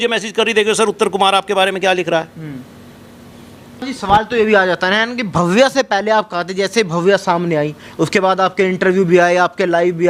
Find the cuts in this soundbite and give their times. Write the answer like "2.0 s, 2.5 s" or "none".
3.8 s

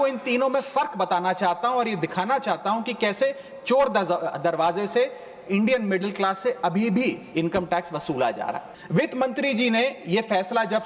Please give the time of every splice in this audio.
8.7 s

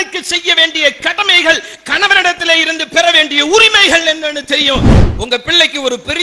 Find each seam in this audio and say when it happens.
5.0 s

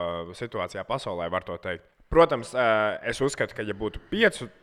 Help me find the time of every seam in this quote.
1.9 s

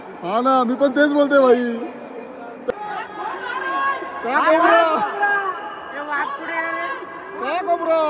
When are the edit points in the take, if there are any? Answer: 2.7 s

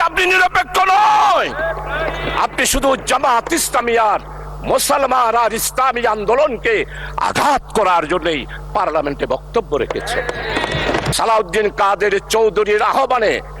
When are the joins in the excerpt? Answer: 11.1 s

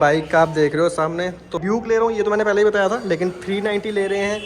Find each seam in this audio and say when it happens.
1.6 s

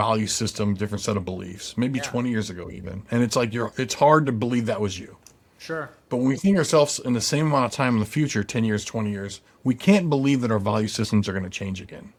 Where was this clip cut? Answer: none

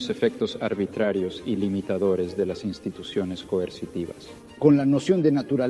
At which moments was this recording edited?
4.4 s

